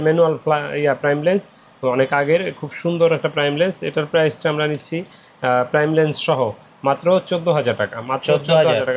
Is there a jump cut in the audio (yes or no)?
no